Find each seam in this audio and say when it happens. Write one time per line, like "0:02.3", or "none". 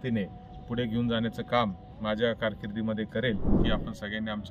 0:03.5